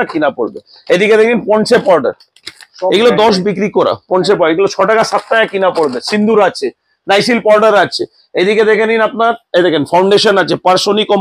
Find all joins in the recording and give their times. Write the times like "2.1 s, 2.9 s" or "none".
none